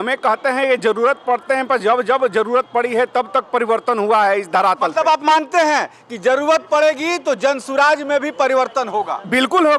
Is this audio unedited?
yes; 0 cuts

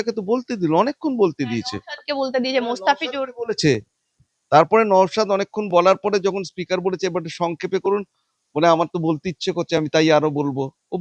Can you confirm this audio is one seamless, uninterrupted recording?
yes; 0 cuts

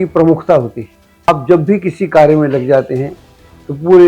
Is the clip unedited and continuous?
no; 1 cut; at 1.3 s

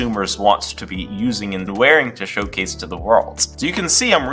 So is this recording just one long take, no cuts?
no; 1 cut; at 3.4 s

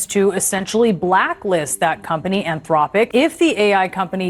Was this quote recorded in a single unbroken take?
no; 1 cut; at 3.1 s

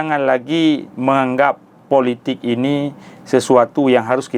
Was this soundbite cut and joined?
no; 0 cuts

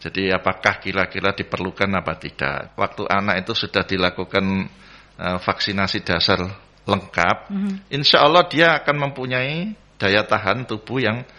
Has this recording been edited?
yes; 1 cut; at 2.6 s

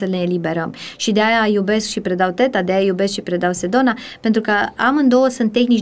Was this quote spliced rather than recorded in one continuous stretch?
no; 0 cuts

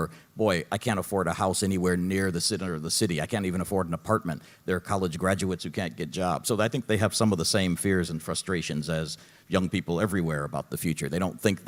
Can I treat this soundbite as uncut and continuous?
yes; 0 cuts

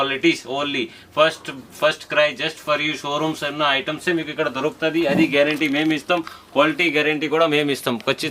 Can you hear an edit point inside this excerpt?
no; 0 cuts

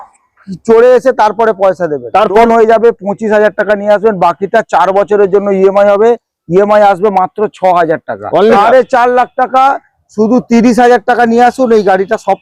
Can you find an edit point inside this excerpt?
yes; 2 cuts; at 2.4 s, 8.5 s

